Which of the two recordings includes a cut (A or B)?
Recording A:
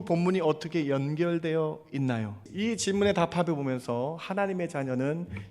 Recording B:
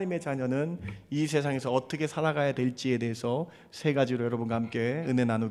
A